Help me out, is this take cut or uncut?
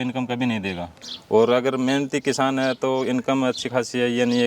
cut